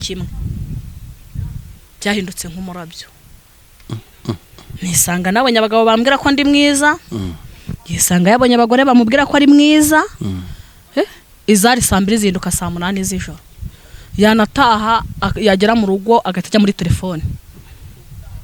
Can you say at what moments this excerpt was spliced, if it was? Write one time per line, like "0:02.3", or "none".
none